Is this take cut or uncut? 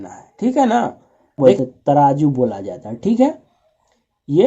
cut